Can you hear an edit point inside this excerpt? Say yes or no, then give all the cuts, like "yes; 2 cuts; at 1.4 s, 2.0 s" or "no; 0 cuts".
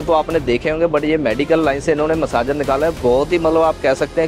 no; 0 cuts